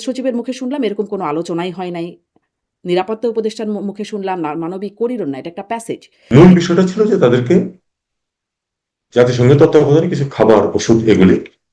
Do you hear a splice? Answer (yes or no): yes